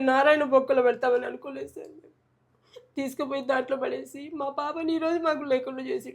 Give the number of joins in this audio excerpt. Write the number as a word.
zero